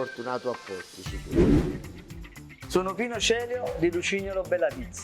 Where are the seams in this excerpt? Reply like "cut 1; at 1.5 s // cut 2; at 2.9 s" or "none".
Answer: cut 1; at 1.1 s // cut 2; at 2.2 s